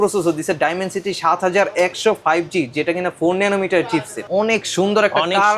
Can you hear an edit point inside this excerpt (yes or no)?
yes